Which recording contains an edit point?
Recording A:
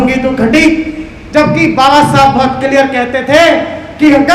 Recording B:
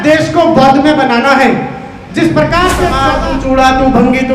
B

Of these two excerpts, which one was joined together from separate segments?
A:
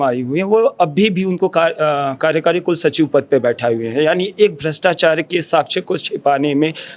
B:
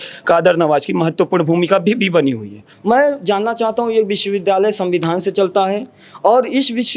B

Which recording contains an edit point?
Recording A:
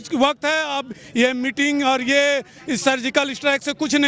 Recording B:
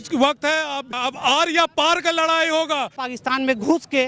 B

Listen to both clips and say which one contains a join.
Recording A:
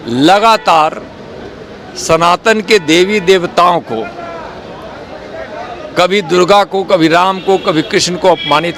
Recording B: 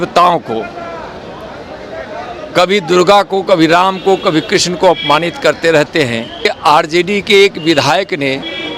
B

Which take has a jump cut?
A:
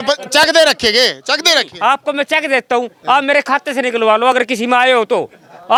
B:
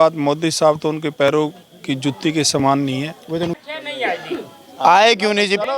B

